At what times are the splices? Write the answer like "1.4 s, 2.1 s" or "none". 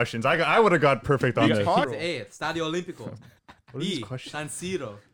1.8 s